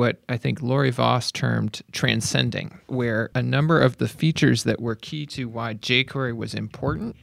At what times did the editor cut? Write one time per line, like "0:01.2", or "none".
0:01.8
0:03.2

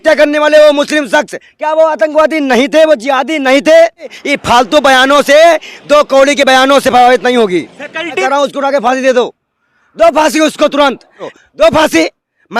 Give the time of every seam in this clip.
0:04.2
0:08.1
0:11.2

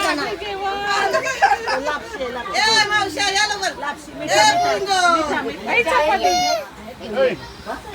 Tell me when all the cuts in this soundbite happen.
none

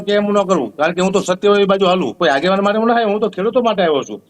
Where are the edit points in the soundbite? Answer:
0:02.1

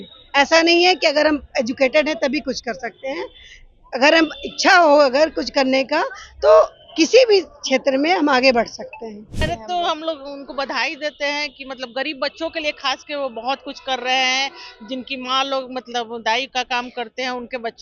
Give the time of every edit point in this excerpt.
0:09.4

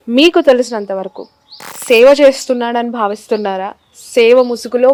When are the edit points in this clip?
none

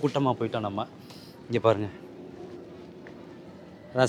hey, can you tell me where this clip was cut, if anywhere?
none

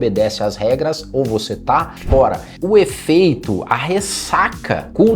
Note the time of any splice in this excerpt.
0:02.5

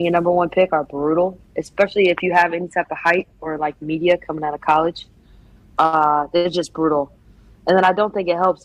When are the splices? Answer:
none

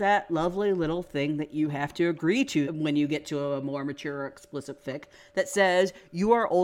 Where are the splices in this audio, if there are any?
0:02.7

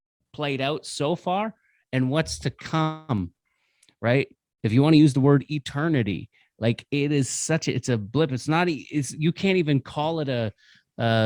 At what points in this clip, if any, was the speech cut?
none

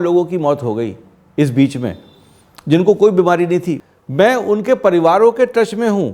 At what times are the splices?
0:03.8

